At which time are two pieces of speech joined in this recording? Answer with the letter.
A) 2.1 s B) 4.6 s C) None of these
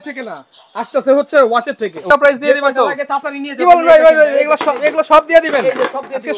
A